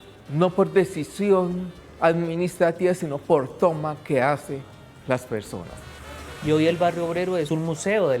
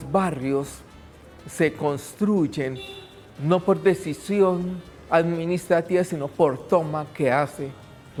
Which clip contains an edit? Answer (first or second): first